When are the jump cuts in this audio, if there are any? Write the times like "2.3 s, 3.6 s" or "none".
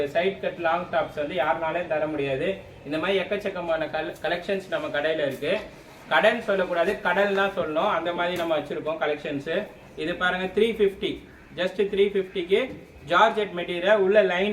none

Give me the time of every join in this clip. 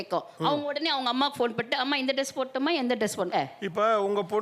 3.3 s

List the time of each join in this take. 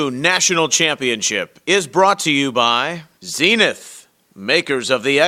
3.0 s

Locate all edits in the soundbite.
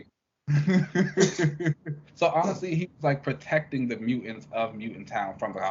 2.0 s

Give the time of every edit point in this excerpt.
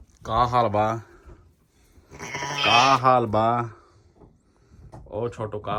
none

